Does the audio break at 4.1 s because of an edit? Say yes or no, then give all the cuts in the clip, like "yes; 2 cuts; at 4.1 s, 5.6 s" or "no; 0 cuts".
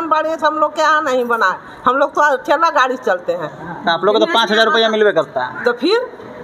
no; 0 cuts